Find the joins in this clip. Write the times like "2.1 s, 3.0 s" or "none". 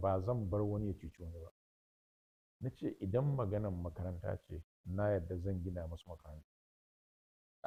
none